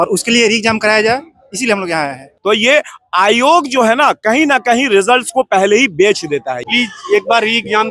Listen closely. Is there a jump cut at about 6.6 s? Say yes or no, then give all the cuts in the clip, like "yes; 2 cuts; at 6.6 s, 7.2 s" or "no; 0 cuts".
yes; 2 cuts; at 2.2 s, 6.6 s